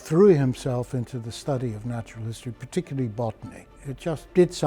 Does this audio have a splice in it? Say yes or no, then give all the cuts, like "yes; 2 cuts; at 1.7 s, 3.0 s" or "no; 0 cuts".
yes; 1 cut; at 3.6 s